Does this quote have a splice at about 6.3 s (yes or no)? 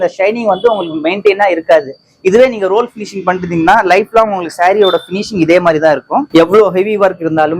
yes